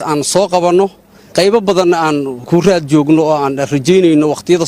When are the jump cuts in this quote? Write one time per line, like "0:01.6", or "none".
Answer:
0:01.3
0:02.4